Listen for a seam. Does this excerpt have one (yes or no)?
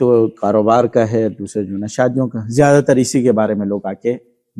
no